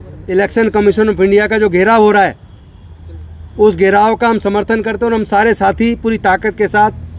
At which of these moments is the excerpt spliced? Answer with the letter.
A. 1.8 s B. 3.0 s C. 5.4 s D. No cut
D